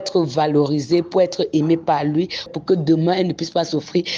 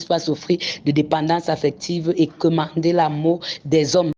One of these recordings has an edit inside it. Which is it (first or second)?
first